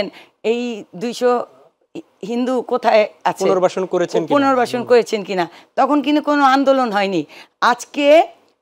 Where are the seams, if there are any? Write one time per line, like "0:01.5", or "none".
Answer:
none